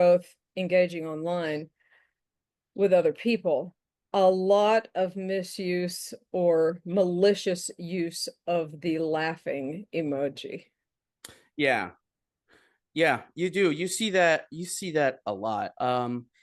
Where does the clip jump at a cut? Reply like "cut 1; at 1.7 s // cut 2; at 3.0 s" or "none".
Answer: none